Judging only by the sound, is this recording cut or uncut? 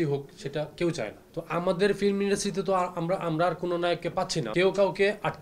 cut